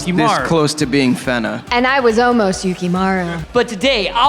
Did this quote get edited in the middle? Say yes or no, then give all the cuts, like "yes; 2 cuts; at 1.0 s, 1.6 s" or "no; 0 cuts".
yes; 2 cuts; at 1.6 s, 3.4 s